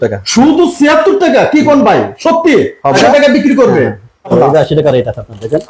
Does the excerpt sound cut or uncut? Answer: cut